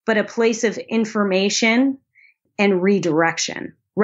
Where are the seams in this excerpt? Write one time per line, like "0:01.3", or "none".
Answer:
0:02.4